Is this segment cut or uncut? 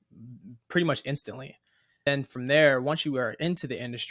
cut